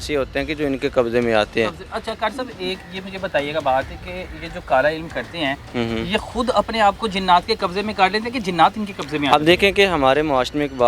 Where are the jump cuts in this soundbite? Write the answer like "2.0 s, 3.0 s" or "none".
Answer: none

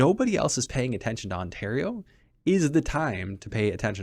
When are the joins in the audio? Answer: none

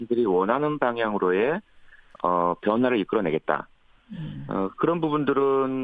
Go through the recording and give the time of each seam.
none

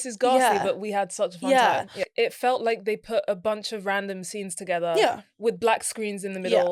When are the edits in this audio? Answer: 2.1 s

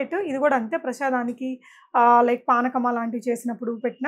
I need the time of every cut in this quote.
none

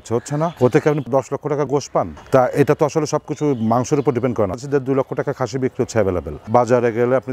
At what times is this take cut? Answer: 2.2 s, 4.6 s, 6.4 s

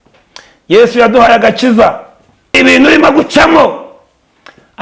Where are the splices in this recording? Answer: 2.6 s

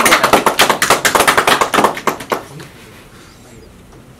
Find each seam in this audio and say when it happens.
none

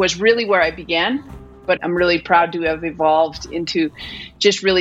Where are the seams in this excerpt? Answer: 1.7 s

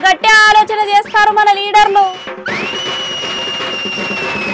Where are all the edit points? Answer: none

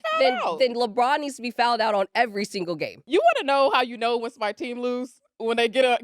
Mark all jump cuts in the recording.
3.0 s

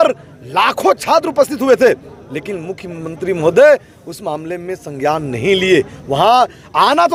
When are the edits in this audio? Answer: none

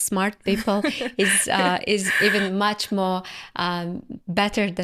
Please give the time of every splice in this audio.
none

